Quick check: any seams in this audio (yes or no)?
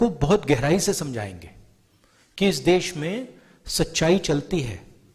no